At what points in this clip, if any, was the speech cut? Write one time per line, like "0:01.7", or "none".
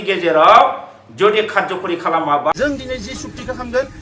0:02.5